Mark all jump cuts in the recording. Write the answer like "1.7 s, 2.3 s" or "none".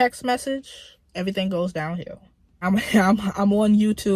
2.6 s